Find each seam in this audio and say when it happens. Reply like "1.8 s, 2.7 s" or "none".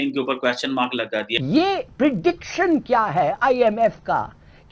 1.3 s